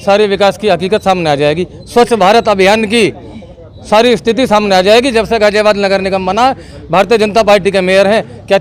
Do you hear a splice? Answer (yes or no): no